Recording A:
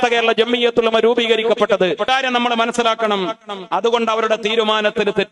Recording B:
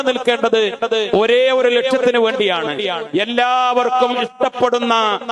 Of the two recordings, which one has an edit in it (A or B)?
A